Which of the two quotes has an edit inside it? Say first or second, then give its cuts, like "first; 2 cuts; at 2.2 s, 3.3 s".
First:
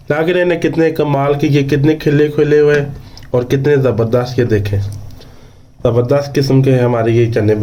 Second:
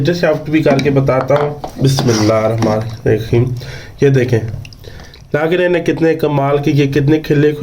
second; 1 cut; at 1.6 s